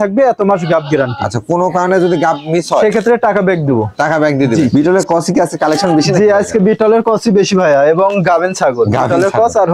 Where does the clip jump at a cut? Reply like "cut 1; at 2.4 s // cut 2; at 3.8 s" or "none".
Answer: cut 1; at 4.7 s

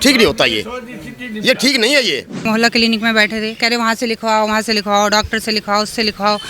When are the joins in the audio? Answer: cut 1; at 2.5 s

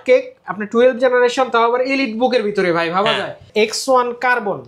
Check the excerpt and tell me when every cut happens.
cut 1; at 3.5 s

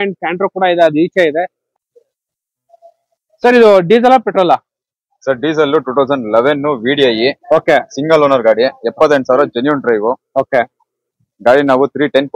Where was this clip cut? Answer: cut 1; at 1.6 s

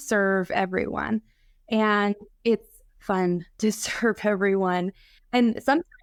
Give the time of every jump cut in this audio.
none

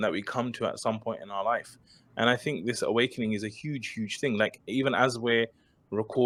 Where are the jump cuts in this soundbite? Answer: none

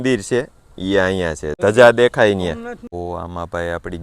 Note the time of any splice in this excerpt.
cut 1; at 1.6 s // cut 2; at 2.9 s

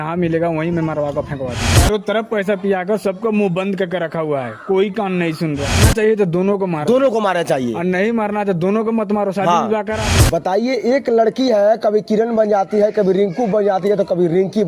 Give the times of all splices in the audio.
cut 1; at 1.7 s // cut 2; at 5.8 s // cut 3; at 10.0 s

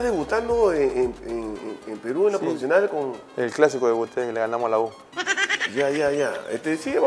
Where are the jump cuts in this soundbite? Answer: none

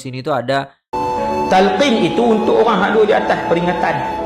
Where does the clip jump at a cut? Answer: cut 1; at 0.9 s

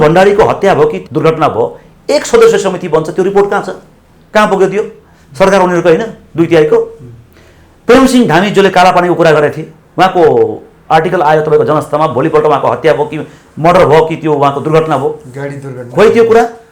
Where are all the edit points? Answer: cut 1; at 1.0 s

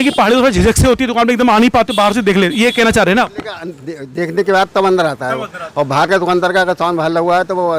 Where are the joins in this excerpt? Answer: none

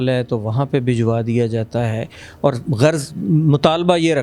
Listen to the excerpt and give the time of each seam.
none

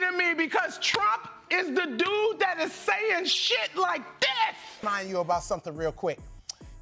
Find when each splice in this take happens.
cut 1; at 4.7 s

